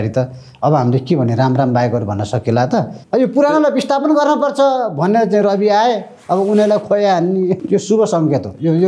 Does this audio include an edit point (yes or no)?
yes